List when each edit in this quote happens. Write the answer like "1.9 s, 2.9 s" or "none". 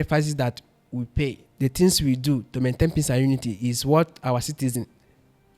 1.5 s